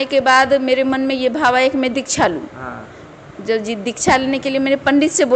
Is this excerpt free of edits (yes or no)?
yes